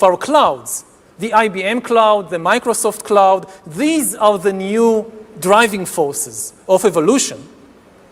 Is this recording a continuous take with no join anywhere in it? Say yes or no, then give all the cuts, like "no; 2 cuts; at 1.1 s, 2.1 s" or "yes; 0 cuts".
yes; 0 cuts